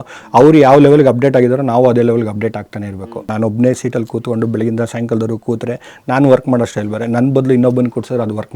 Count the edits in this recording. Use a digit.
1